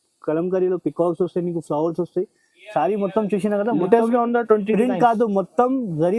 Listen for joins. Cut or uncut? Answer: uncut